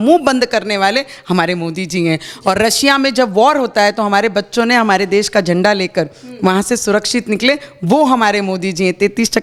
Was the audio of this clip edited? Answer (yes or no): no